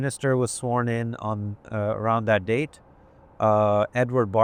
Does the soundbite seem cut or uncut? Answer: uncut